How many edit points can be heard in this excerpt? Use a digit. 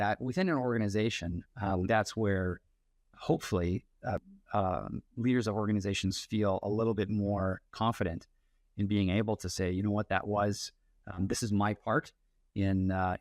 2